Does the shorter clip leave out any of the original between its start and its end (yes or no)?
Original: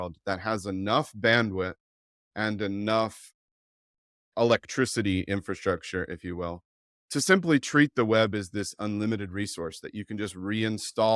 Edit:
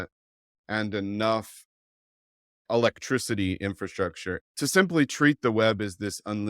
yes